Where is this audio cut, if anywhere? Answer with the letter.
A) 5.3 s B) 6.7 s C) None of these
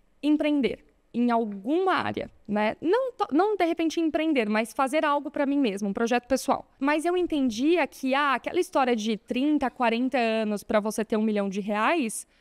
B